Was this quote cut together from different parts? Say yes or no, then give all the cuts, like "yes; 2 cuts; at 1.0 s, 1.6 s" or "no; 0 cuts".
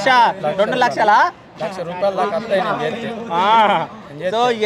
no; 0 cuts